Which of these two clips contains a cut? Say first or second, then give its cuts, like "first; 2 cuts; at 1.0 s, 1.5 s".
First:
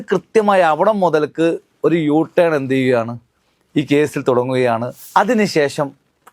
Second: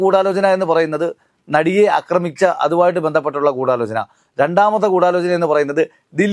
first; 1 cut; at 5.0 s